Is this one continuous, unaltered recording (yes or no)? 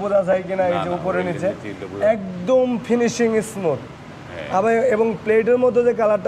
yes